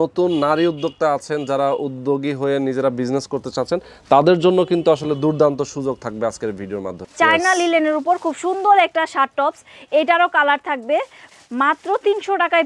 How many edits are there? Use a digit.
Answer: 2